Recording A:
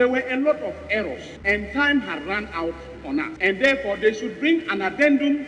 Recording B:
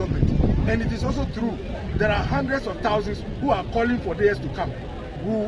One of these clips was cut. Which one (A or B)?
A